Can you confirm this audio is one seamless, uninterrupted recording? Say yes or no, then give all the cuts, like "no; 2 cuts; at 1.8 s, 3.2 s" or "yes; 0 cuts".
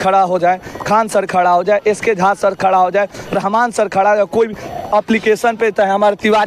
yes; 0 cuts